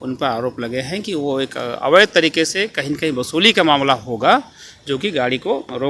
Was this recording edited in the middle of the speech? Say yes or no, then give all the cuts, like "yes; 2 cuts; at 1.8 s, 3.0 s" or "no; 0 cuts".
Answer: no; 0 cuts